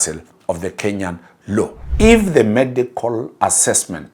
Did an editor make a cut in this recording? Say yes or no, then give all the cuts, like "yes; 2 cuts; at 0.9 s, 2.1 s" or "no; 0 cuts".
yes; 1 cut; at 1.8 s